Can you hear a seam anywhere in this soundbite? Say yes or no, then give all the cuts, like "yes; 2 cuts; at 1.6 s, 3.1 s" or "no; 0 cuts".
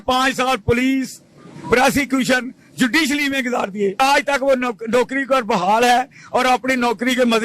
yes; 1 cut; at 4.0 s